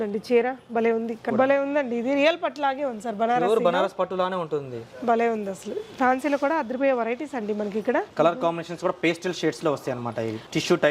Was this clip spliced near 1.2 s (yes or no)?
yes